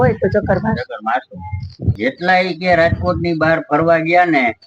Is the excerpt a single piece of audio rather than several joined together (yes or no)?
no